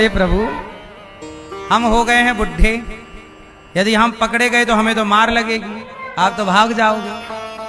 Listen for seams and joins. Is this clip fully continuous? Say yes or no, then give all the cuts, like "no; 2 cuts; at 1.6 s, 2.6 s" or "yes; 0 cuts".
yes; 0 cuts